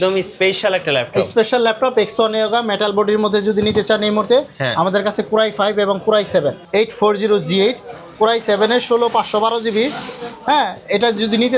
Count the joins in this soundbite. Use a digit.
1